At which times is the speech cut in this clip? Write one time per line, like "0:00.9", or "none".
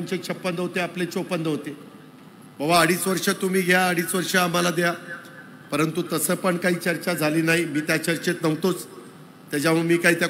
none